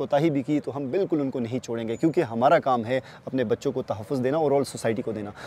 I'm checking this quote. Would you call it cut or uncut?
uncut